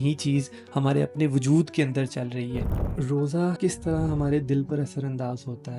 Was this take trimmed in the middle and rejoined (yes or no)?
yes